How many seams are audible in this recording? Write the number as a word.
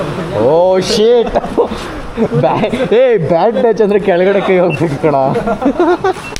zero